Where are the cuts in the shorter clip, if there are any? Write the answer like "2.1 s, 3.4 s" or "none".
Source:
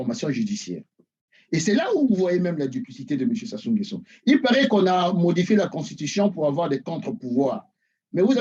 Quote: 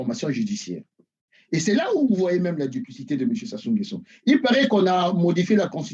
none